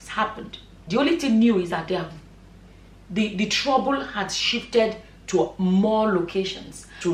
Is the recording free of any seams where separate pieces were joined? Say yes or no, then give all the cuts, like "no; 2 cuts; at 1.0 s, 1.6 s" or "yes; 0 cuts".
yes; 0 cuts